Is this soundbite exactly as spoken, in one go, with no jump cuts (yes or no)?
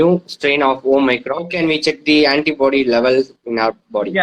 no